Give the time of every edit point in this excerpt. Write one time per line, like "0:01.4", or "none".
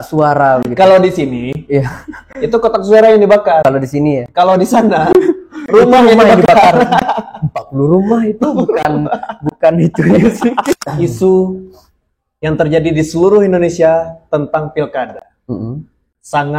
0:10.7